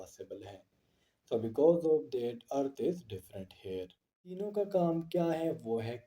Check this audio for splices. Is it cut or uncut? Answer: cut